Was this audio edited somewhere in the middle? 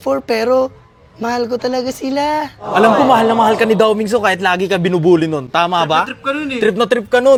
no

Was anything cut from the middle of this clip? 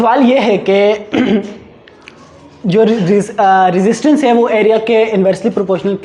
no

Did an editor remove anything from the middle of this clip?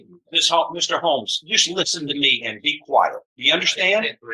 no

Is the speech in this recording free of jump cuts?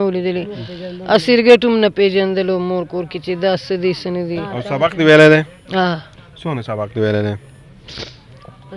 yes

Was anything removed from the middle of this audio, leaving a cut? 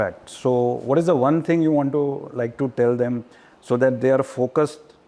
no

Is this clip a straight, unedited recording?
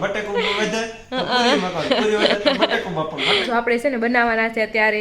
no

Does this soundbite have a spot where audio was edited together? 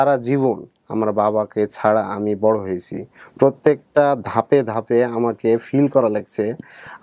no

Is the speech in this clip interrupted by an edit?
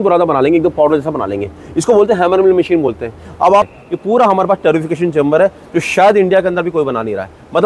yes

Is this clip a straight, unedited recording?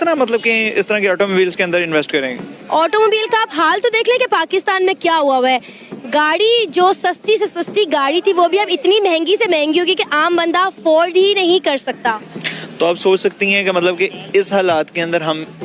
yes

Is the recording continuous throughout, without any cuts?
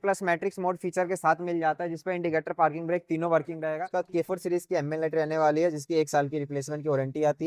no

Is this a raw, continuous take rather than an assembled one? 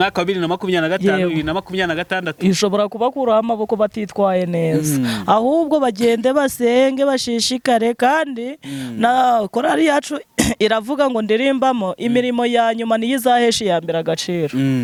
yes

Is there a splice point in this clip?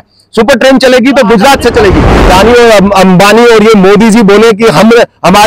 yes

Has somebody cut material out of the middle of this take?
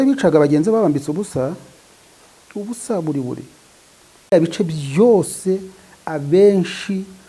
yes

